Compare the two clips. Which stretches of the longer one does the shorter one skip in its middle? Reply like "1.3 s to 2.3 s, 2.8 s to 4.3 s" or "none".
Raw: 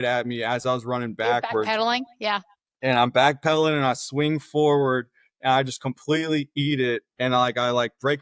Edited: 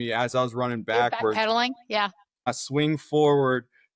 2.8 s to 3.9 s

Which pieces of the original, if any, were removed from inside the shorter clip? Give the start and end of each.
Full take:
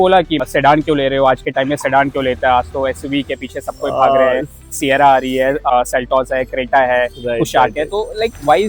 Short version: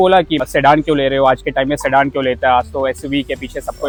none

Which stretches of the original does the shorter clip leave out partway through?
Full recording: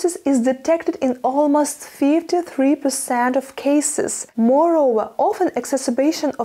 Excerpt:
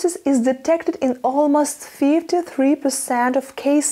none

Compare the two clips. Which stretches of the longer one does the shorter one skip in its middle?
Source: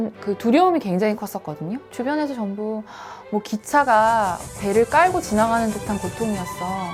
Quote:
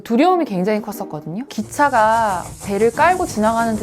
1.9 s to 3.5 s

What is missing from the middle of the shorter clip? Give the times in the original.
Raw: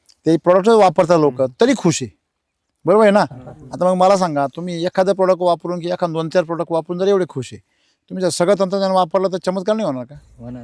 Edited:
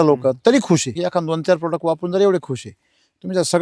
2.1 s to 5.8 s

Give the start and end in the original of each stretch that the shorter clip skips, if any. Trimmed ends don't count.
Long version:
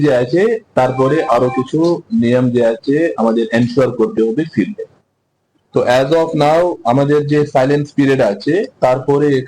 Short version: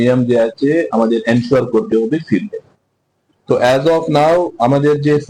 none

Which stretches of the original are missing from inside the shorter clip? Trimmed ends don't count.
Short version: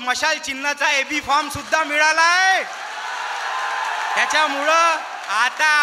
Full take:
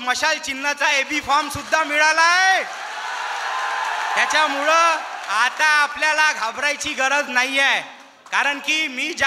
none

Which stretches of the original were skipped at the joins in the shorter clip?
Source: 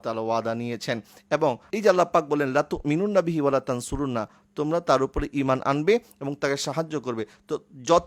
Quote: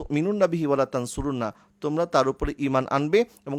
none

